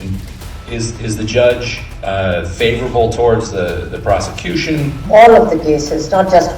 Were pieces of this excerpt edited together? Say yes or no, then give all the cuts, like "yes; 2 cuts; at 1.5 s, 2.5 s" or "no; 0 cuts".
yes; 1 cut; at 4.9 s